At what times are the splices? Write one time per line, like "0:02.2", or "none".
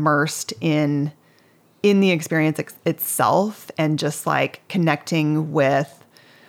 none